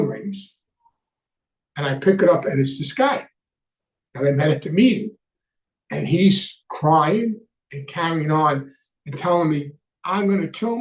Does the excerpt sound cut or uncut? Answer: uncut